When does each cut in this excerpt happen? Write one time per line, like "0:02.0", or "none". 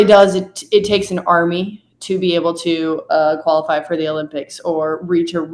none